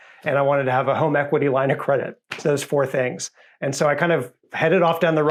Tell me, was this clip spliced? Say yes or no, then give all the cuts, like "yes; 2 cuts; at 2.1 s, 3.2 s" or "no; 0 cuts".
no; 0 cuts